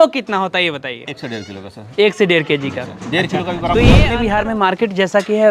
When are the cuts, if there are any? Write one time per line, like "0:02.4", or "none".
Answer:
0:04.1